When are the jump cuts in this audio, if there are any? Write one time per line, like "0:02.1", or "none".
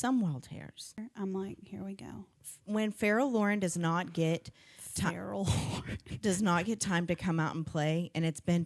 0:01.1